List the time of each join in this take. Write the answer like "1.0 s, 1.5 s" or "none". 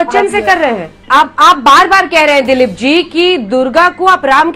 0.9 s